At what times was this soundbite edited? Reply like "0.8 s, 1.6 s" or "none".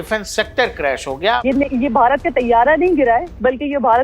1.4 s